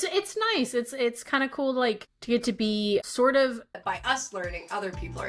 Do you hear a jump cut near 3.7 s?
yes; 3 cuts; at 2.1 s, 3.0 s, 3.7 s

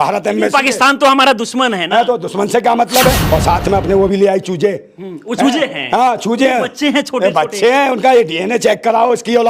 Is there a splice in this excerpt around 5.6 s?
no; 1 cut; at 3.2 s

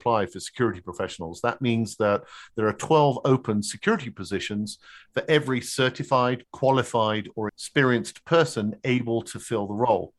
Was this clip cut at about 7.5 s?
yes; 1 cut; at 7.5 s

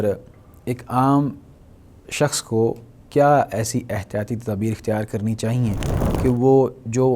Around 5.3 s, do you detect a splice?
no; 0 cuts

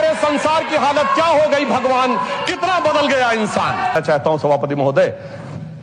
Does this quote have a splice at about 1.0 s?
no; 1 cut; at 3.9 s

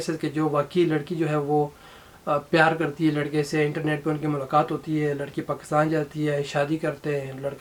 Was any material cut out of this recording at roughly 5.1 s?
no; 0 cuts

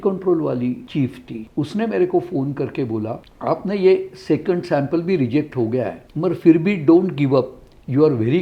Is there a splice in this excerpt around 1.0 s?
yes; 3 cuts; at 1.0 s, 3.2 s, 6.0 s

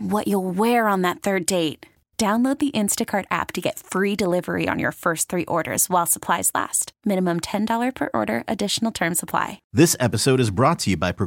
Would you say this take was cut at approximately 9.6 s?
yes; 1 cut; at 9.6 s

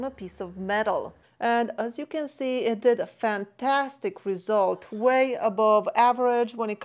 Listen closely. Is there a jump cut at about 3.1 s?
no; 1 cut; at 1.2 s

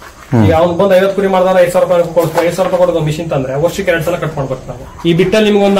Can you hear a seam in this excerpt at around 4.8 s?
yes; 1 cut; at 4.8 s

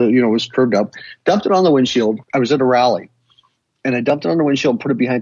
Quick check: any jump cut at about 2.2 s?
yes; 1 cut; at 2.2 s

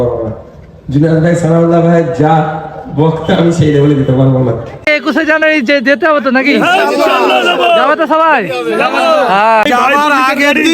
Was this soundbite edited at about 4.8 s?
yes; 2 cuts; at 4.8 s, 9.6 s

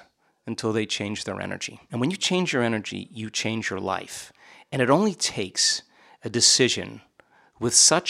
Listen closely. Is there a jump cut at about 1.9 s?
yes; 1 cut; at 1.9 s

